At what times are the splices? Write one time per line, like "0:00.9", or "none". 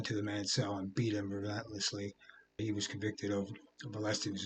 0:02.6